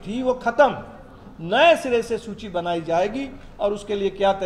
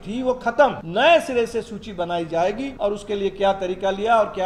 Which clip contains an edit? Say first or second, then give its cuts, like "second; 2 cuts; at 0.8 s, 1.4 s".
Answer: second; 2 cuts; at 0.8 s, 2.7 s